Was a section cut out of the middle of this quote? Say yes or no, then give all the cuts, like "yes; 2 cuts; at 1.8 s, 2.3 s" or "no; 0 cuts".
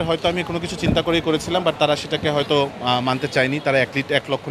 no; 0 cuts